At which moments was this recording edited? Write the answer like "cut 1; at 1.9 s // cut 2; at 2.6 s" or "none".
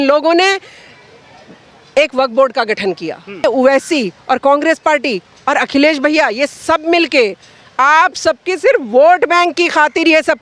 cut 1; at 3.4 s